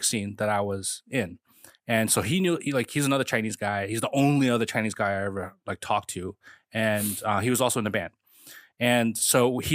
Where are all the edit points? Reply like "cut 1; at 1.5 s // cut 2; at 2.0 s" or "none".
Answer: none